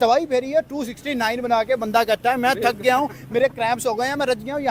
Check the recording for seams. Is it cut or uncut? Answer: uncut